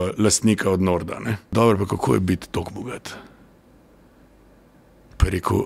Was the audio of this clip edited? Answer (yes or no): yes